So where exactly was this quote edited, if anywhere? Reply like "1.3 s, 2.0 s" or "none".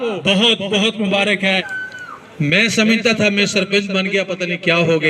1.7 s